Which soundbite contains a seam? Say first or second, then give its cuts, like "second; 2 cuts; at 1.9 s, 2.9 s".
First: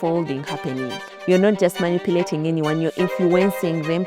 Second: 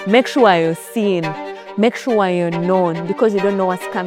first; 1 cut; at 1.1 s